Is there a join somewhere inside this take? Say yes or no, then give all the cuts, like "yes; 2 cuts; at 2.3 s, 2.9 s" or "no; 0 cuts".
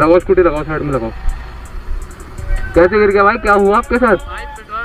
yes; 1 cut; at 2.5 s